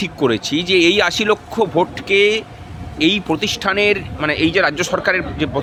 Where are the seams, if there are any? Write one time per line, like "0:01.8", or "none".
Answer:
none